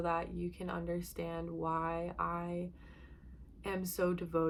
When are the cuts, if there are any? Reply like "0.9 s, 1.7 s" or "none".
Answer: none